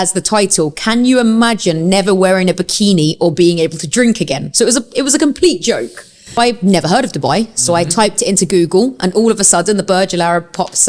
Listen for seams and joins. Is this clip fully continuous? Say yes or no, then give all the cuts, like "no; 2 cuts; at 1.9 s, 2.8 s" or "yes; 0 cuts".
no; 1 cut; at 6.4 s